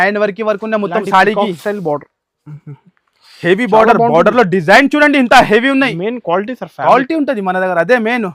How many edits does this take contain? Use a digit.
0